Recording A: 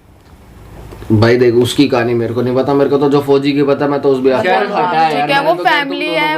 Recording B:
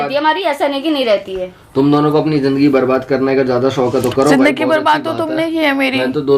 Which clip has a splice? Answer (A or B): A